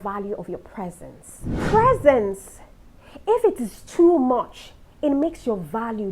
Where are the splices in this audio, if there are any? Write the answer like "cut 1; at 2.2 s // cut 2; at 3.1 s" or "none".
cut 1; at 1.5 s